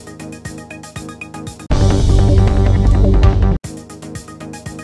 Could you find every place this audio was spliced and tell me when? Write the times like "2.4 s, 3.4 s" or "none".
none